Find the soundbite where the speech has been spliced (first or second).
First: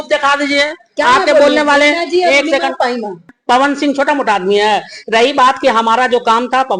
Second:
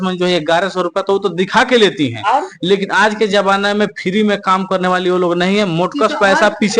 first